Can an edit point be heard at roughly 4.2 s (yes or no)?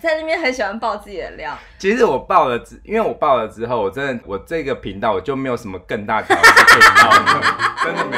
yes